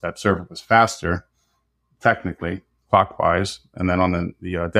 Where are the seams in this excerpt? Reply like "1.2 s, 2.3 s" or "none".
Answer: none